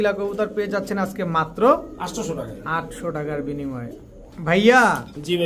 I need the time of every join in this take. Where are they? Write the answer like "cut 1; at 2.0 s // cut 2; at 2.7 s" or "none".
none